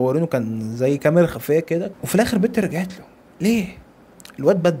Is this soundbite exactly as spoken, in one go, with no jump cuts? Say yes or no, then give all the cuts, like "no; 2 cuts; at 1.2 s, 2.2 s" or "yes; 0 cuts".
no; 1 cut; at 2.0 s